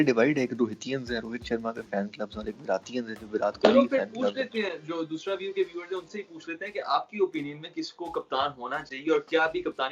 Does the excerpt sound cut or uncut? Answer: uncut